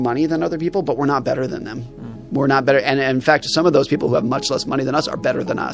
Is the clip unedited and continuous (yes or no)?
yes